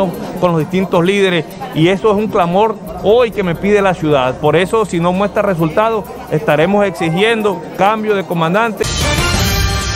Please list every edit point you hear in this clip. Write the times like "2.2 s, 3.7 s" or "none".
8.9 s